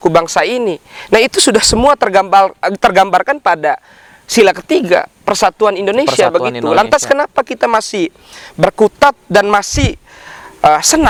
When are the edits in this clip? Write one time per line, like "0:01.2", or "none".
none